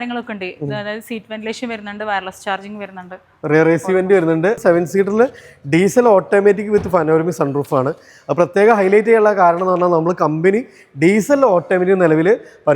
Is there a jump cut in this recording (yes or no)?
yes